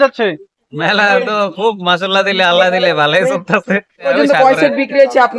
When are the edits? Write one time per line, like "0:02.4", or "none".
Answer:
0:04.1